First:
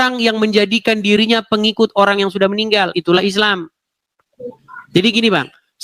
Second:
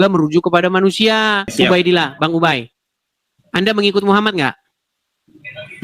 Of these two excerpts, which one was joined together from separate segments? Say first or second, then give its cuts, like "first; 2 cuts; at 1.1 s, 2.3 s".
second; 1 cut; at 1.5 s